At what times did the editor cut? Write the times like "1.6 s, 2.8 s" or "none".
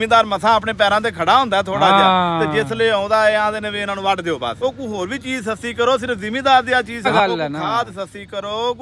4.6 s, 7.1 s